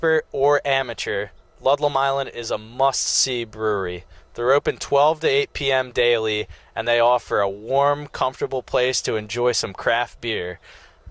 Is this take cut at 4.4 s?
no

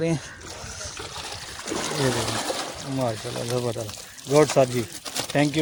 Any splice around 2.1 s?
no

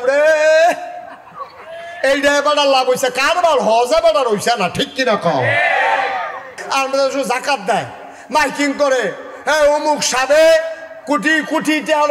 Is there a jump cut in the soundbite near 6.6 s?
yes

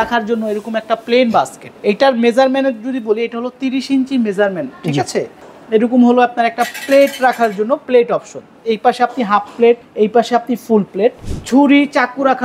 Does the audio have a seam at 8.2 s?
no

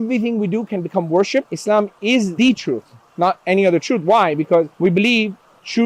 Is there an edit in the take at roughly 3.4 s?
no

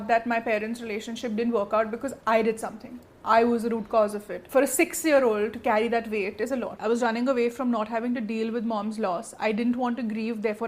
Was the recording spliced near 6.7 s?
yes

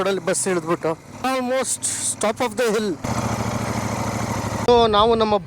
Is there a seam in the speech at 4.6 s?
yes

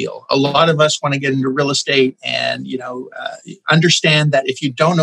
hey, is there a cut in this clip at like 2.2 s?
no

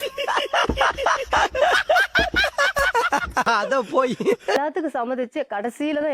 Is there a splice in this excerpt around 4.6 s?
yes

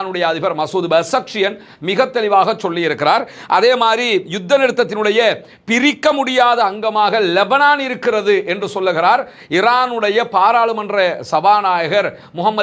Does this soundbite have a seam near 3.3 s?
no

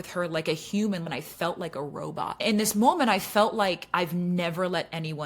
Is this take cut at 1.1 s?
yes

